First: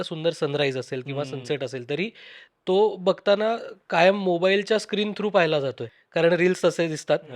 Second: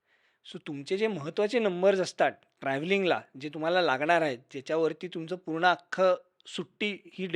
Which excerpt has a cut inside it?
first; 1 cut; at 5.9 s

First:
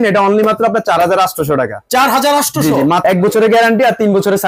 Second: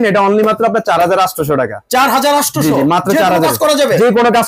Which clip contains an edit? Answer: first; 1 cut; at 3.0 s

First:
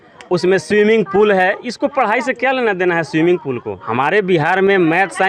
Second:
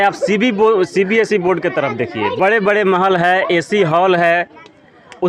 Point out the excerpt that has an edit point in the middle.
first; 1 cut; at 3.7 s

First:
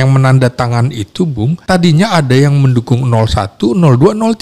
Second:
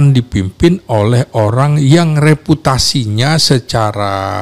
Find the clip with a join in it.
first; 1 cut; at 1.6 s

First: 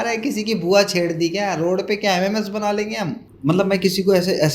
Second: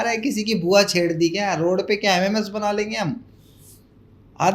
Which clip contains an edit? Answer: first; 1 cut; at 3.2 s

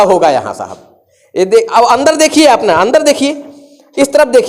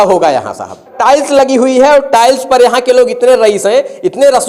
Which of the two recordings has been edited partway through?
second; 1 cut; at 1.0 s

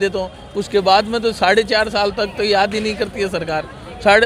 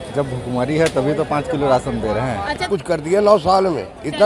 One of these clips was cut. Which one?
second; 1 cut; at 2.9 s

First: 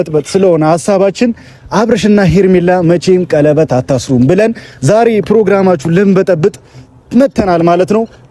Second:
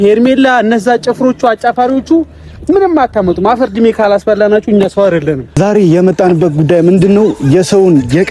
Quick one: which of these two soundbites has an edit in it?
second; 1 cut; at 5.6 s

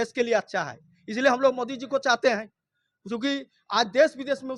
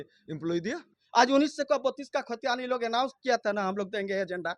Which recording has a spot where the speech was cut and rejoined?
second; 1 cut; at 0.9 s

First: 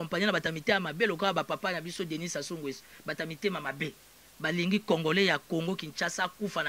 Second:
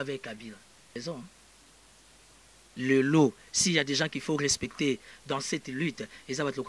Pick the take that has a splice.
second; 1 cut; at 1.0 s

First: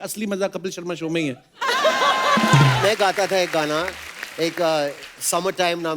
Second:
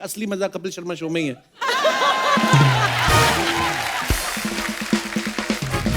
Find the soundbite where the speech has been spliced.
first; 1 cut; at 2.8 s

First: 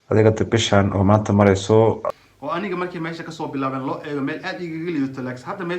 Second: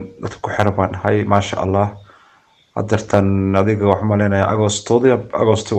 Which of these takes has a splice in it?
first; 1 cut; at 2.0 s

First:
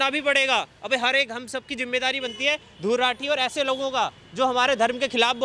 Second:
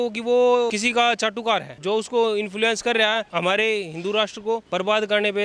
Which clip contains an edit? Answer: second; 4 cuts; at 0.8 s, 1.7 s, 3.3 s, 4.7 s

